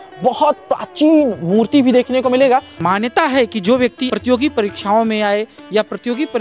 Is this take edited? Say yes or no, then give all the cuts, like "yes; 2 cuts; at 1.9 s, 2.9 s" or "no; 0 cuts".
yes; 2 cuts; at 2.7 s, 4.0 s